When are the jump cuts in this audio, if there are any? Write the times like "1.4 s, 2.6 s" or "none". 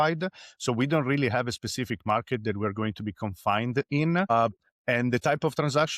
4.3 s